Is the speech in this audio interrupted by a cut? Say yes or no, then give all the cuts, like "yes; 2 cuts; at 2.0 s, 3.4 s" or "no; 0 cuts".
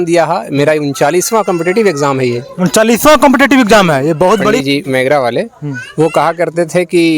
yes; 1 cut; at 4.6 s